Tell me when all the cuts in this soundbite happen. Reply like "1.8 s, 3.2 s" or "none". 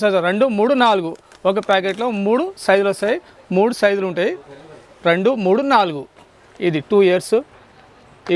none